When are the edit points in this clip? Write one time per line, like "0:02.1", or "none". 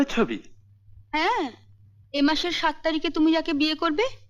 none